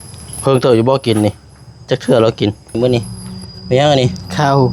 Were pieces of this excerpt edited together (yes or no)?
yes